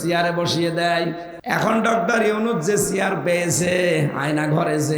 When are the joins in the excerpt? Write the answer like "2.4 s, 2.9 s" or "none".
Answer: 1.3 s